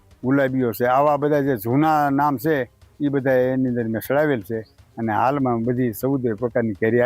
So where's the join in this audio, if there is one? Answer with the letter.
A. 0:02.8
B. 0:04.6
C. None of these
C